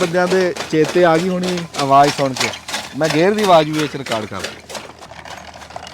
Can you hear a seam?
yes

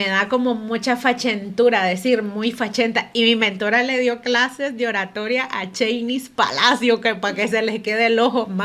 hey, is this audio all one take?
yes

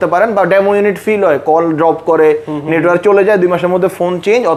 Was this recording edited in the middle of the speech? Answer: no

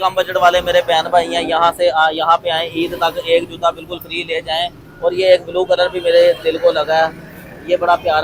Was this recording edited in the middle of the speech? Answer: no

